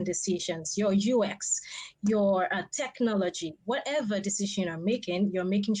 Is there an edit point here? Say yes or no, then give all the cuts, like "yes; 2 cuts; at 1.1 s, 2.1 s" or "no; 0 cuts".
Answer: no; 0 cuts